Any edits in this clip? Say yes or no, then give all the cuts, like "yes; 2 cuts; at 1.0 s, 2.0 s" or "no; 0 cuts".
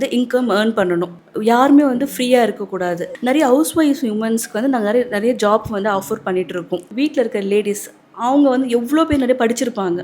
yes; 3 cuts; at 1.2 s, 3.1 s, 6.9 s